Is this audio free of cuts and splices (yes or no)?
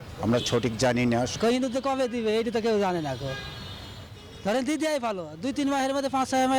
yes